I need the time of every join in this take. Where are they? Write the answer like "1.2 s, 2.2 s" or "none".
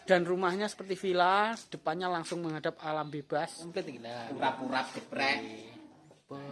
3.7 s